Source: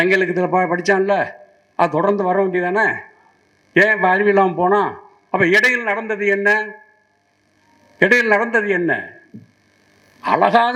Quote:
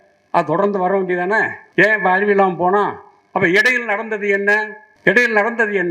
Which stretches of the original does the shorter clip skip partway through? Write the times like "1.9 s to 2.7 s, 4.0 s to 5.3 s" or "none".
3.0 s to 3.6 s, 6.8 s to 7.8 s